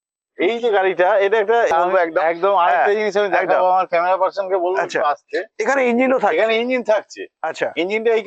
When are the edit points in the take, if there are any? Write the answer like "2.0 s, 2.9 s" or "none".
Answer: 1.7 s